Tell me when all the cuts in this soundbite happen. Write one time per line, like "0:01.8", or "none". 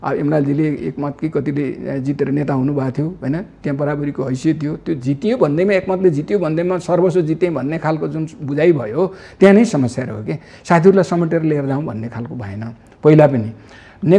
none